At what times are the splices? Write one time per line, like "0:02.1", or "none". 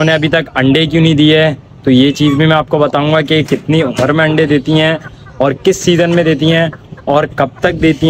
none

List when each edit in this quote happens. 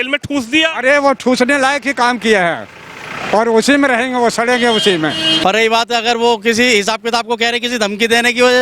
0:05.4

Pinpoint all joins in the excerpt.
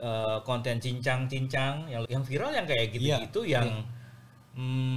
0:02.0

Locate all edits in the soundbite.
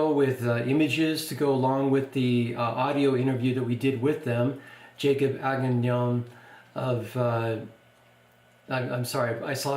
0:03.3

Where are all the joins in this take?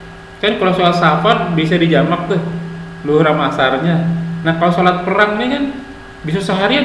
none

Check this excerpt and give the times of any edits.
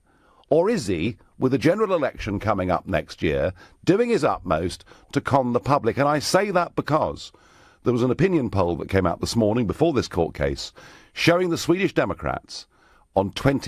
0:03.7

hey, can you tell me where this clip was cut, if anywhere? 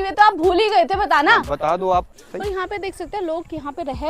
0:02.1

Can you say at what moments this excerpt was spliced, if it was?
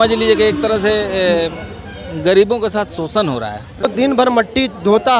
0:03.9

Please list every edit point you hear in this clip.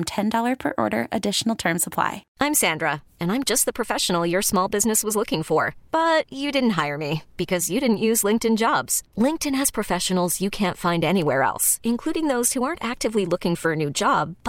0:02.2

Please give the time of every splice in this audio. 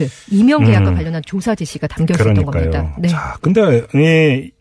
0:02.2

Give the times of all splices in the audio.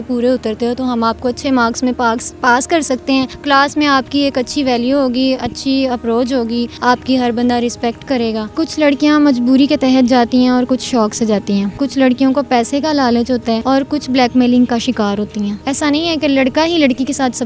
0:03.4
0:06.7
0:08.5
0:11.7
0:13.6
0:15.6

